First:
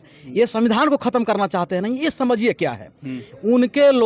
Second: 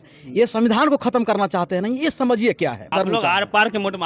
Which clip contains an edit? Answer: second; 1 cut; at 2.9 s

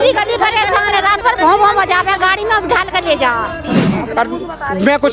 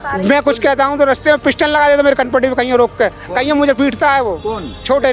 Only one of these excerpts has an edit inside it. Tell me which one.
first; 1 cut; at 3.7 s

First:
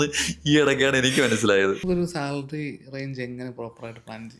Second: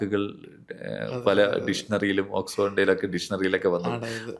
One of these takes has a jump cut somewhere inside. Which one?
first; 1 cut; at 1.8 s

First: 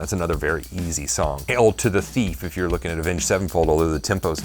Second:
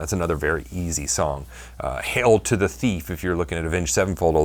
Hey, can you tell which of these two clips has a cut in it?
first; 1 cut; at 1.4 s

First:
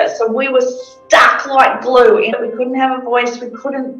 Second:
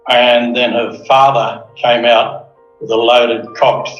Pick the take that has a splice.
first; 1 cut; at 2.3 s

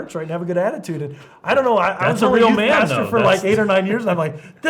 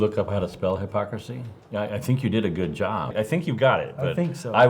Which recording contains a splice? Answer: second; 1 cut; at 3.1 s

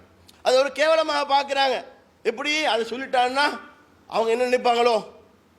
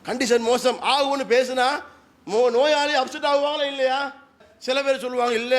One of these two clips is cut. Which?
second; 1 cut; at 4.5 s

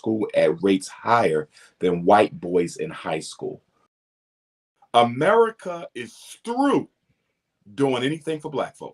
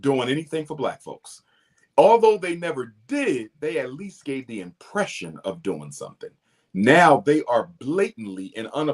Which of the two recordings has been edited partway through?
first; 1 cut; at 4.4 s

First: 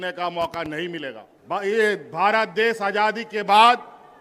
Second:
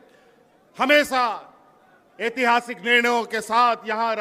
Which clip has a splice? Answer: first; 1 cut; at 1.3 s

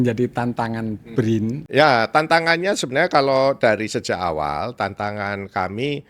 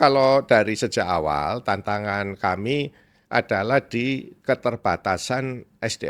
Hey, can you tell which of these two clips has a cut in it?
first; 1 cut; at 1.6 s

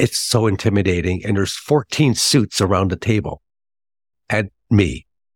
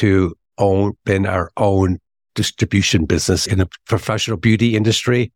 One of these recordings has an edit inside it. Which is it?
second; 1 cut; at 3.4 s

